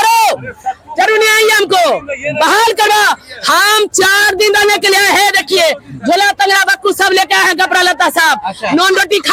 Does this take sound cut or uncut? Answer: uncut